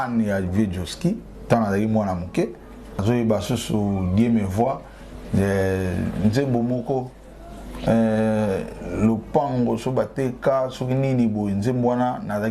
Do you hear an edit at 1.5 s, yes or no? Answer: no